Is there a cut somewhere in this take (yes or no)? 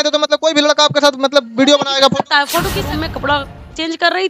yes